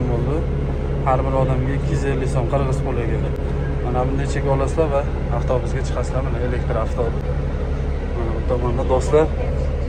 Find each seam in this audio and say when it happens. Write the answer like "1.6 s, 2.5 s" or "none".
none